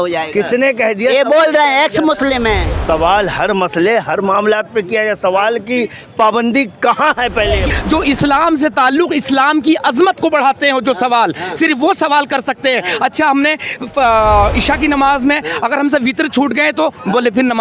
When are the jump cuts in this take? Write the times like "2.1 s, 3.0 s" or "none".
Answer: 2.7 s, 7.7 s

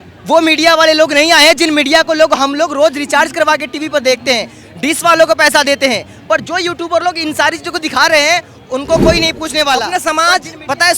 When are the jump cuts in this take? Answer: 9.9 s

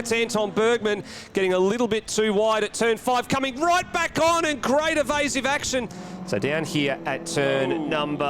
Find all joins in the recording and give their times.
6.0 s

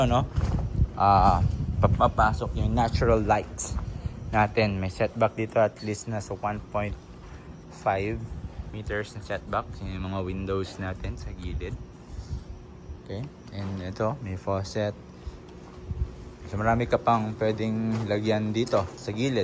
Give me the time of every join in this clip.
none

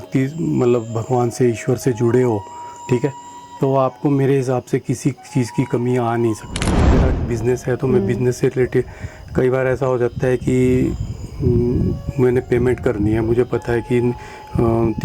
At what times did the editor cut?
7.0 s

